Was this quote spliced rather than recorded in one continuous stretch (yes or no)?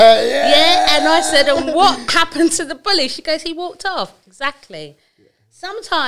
no